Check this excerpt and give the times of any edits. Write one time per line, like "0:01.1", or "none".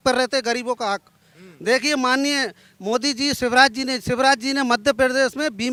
none